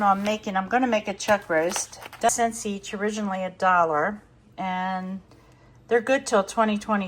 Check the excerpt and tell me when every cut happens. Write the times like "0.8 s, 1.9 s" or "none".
2.3 s

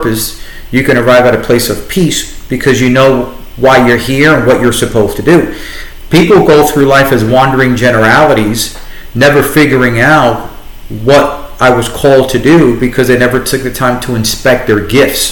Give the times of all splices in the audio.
none

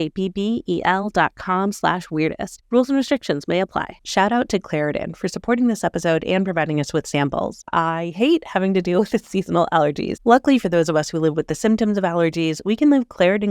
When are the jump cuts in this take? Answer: 4.0 s, 7.6 s, 10.1 s

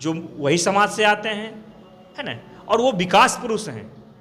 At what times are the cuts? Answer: none

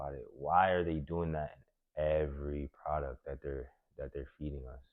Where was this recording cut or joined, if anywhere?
none

